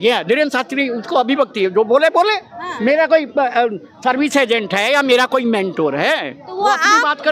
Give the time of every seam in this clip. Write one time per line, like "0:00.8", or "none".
none